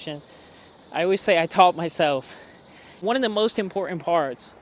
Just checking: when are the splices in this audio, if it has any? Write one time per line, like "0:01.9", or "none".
0:02.9